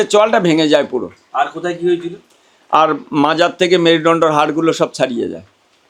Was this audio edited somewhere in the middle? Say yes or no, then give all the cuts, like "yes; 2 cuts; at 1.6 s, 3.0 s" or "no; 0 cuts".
no; 0 cuts